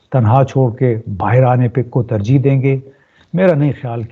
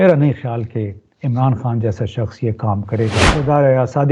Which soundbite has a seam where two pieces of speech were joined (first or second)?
second